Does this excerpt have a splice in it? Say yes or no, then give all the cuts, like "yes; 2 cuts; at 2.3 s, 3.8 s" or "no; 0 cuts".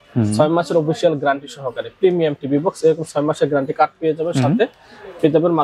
no; 0 cuts